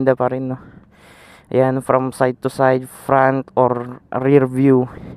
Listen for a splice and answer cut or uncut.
uncut